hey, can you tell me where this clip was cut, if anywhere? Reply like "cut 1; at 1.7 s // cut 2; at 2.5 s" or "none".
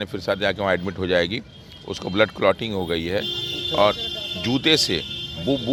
none